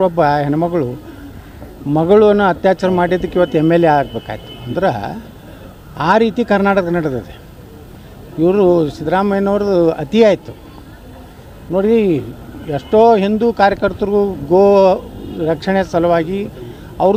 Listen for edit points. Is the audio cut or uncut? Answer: uncut